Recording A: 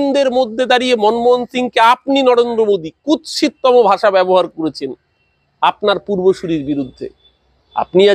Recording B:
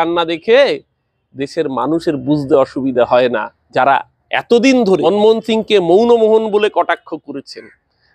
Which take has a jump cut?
B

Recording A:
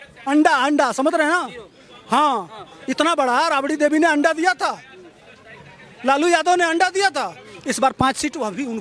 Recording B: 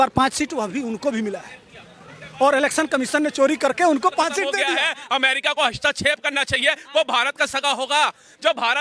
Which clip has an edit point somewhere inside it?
B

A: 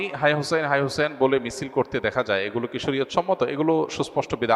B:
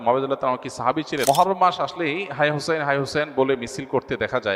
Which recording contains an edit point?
B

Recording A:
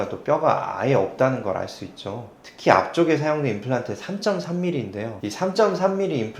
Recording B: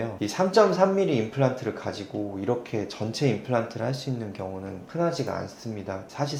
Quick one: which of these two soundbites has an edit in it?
A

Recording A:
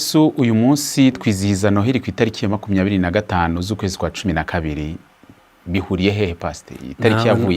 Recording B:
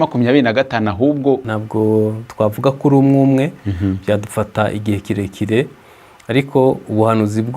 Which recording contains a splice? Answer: B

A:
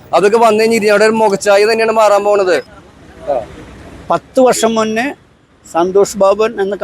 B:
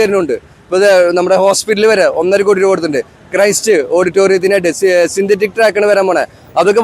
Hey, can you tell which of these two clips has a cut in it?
A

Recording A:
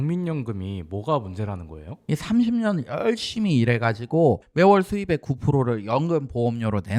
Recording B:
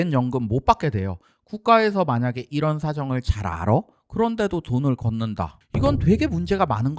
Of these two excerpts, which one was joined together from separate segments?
A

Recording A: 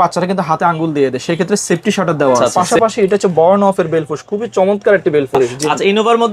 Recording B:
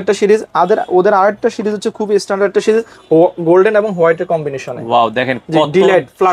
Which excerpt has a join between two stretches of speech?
A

